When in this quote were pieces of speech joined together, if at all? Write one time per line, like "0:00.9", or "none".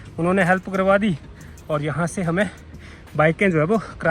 none

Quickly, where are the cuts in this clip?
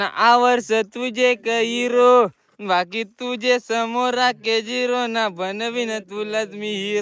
none

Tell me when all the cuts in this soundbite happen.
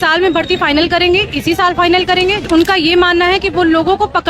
0:02.5

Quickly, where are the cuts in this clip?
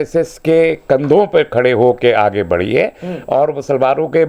none

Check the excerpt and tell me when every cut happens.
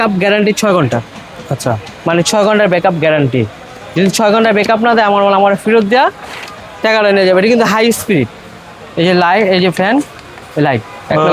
none

